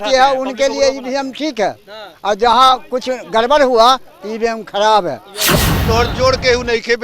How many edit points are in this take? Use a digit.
1